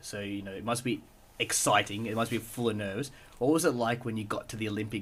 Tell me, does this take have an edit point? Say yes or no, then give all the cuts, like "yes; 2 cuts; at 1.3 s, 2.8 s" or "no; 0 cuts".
no; 0 cuts